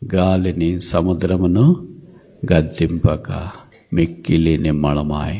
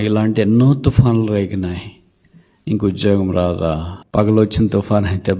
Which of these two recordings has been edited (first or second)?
second